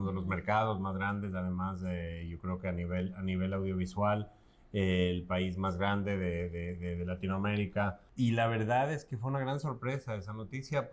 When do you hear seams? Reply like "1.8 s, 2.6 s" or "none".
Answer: 8.0 s